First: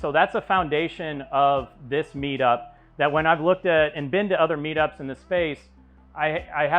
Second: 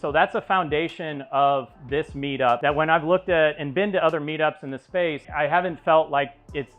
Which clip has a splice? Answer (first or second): second